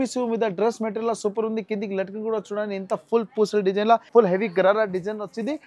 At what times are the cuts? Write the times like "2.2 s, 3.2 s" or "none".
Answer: 4.1 s